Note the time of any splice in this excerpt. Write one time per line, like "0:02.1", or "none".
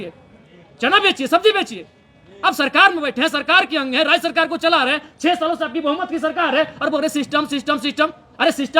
none

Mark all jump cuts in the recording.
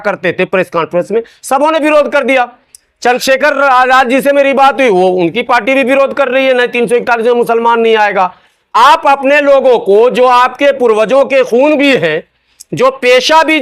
none

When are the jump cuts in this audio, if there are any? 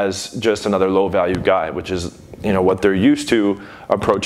none

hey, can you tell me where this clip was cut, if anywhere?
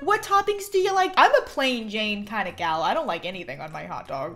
0:01.1

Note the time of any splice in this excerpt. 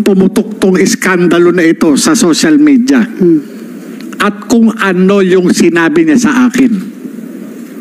none

